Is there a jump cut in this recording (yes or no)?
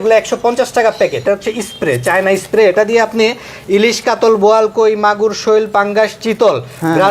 yes